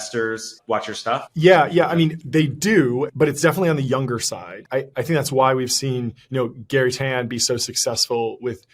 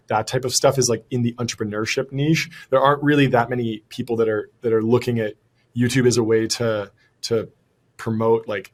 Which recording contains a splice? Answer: first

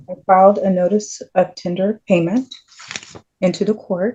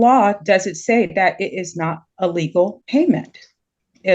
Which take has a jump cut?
second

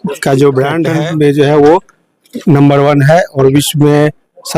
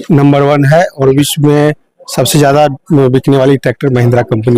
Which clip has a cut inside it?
first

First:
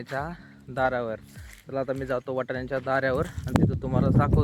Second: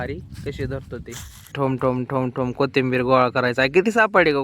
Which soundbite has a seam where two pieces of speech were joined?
second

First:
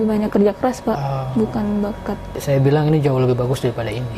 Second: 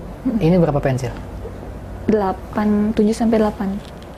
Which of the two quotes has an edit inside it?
first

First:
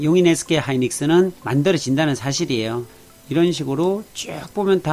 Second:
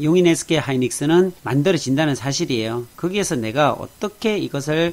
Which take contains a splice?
first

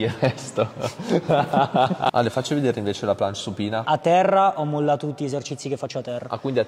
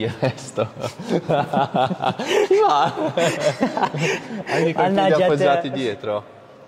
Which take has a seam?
first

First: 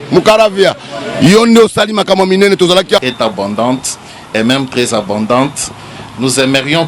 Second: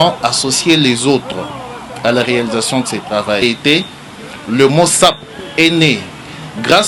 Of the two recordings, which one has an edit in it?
first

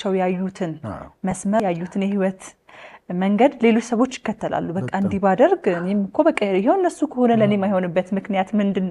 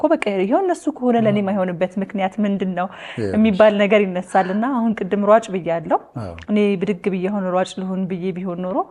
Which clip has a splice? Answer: first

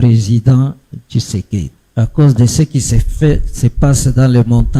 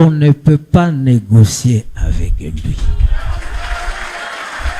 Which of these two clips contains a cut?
first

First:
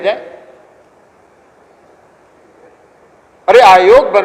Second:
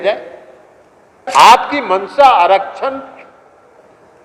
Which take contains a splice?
second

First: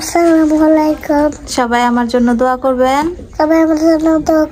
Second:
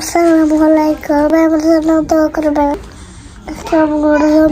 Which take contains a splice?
second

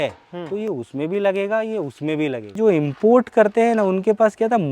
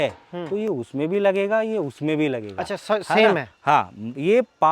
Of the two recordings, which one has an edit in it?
first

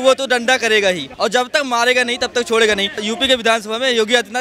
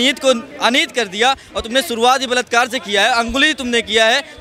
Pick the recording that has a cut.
first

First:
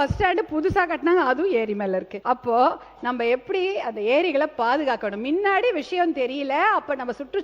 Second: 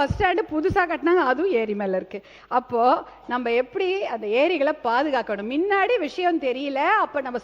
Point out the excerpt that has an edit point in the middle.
first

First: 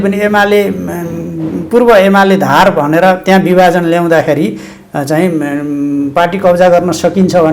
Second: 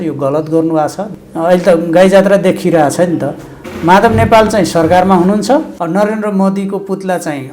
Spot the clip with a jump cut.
second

